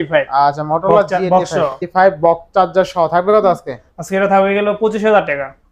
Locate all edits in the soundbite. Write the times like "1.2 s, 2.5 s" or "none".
1.8 s

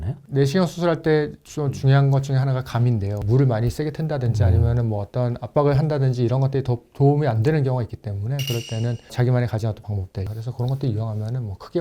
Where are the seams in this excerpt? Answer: 3.2 s, 10.3 s

